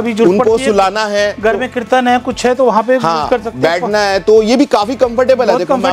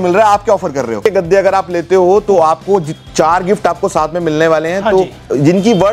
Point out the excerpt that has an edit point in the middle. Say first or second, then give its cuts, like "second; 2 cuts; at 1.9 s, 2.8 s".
second; 1 cut; at 1.0 s